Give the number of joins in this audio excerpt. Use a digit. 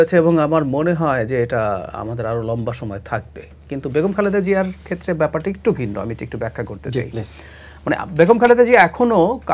0